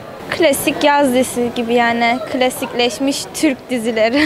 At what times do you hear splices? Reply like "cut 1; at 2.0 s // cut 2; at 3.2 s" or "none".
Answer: none

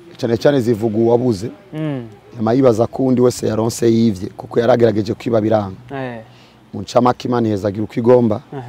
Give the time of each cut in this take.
none

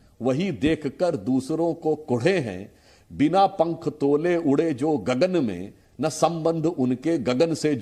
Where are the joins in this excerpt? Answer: none

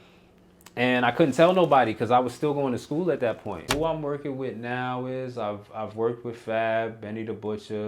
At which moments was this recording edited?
cut 1; at 3.7 s

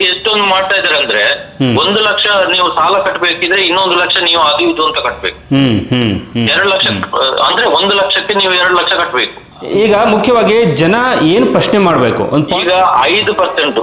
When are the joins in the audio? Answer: cut 1; at 9.6 s

